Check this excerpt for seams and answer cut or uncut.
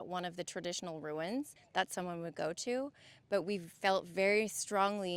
cut